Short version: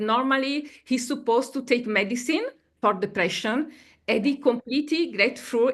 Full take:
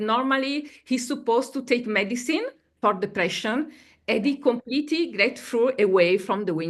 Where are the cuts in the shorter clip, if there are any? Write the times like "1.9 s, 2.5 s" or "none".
none

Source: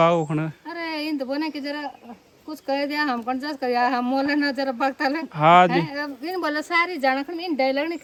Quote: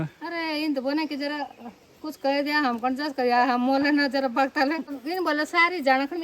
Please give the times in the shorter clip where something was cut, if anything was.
4.8 s

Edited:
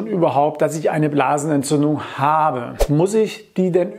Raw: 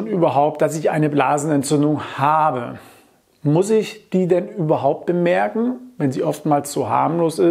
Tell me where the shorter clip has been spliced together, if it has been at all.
2.7 s

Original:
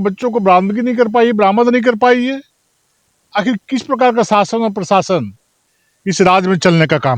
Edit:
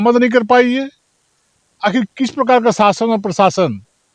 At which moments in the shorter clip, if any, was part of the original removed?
none

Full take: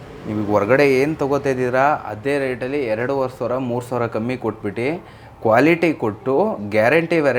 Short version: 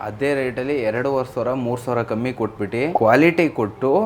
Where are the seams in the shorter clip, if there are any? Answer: 2.9 s

